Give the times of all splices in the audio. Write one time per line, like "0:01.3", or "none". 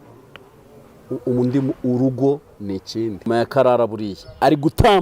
0:03.3